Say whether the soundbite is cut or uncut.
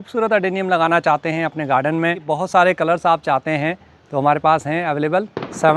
uncut